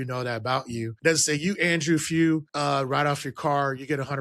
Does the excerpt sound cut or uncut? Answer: cut